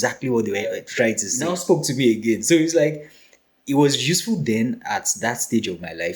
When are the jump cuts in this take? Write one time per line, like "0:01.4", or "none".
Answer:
0:01.5